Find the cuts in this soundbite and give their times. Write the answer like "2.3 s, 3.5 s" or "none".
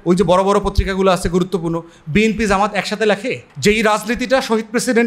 3.5 s